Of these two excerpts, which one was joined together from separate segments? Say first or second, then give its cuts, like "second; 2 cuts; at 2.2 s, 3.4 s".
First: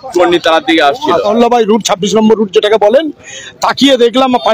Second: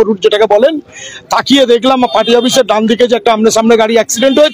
first; 1 cut; at 1.3 s